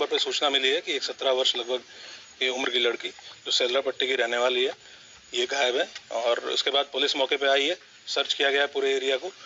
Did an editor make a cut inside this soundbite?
no; 0 cuts

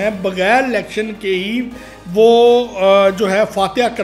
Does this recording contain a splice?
no; 0 cuts

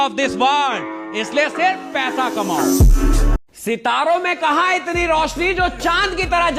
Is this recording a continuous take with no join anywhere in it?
yes; 0 cuts

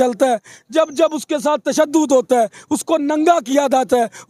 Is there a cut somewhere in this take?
no; 0 cuts

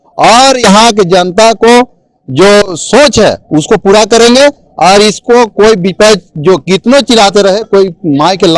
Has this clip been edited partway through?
no; 0 cuts

